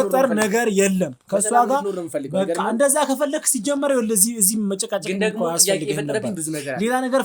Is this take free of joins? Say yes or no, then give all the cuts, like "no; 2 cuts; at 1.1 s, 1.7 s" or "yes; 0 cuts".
yes; 0 cuts